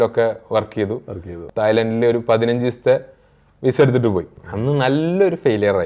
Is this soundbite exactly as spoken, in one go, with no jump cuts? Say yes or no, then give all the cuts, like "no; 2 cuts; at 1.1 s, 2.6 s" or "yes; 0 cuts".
no; 2 cuts; at 1.4 s, 4.4 s